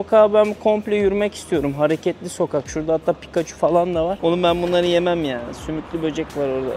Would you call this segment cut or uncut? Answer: cut